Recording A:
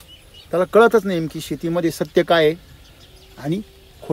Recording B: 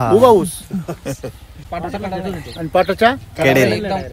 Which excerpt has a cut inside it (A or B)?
B